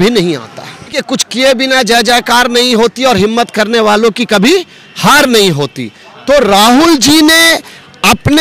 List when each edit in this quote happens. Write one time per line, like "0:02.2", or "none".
0:01.1